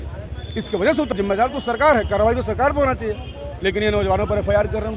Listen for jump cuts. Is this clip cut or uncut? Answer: cut